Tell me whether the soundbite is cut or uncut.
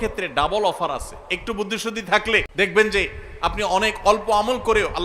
cut